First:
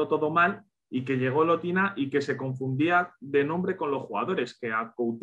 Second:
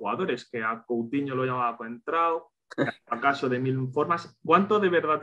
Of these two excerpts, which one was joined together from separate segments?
second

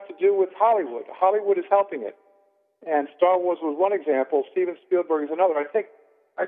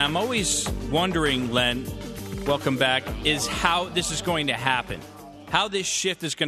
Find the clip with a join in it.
second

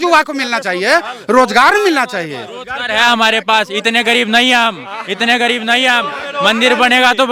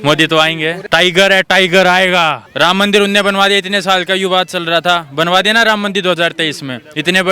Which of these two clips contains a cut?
second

